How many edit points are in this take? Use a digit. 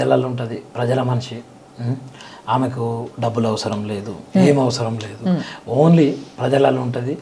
0